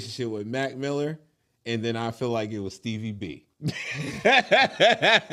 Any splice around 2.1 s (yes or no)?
no